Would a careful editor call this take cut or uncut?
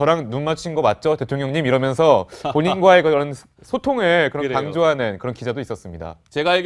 cut